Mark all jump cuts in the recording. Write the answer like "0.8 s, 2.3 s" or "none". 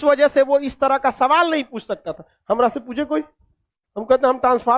none